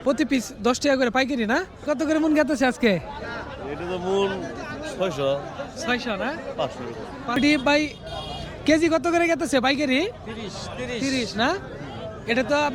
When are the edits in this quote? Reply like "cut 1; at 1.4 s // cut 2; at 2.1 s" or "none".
cut 1; at 1.8 s // cut 2; at 7.4 s